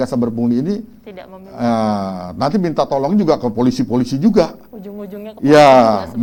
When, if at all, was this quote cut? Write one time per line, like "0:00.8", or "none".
none